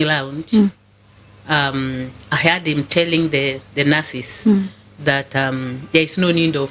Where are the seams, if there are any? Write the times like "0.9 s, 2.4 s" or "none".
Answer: none